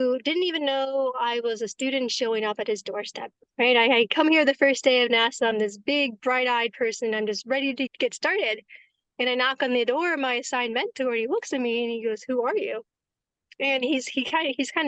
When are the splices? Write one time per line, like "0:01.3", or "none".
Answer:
0:07.9